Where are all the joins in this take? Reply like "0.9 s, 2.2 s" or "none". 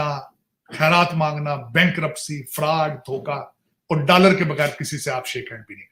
none